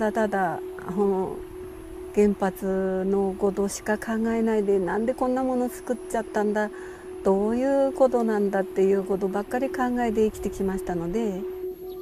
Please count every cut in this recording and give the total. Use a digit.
1